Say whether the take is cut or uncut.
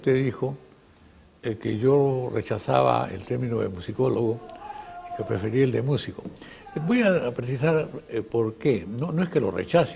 uncut